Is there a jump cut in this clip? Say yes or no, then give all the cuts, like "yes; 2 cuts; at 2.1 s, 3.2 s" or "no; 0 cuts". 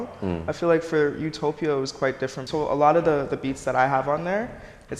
yes; 1 cut; at 2.4 s